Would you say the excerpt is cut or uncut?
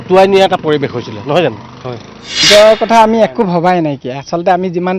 cut